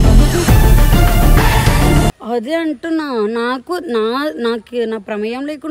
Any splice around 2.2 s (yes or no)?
yes